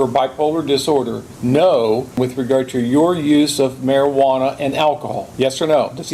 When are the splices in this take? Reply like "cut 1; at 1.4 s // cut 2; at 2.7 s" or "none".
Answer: cut 1; at 1.2 s // cut 2; at 2.2 s // cut 3; at 5.2 s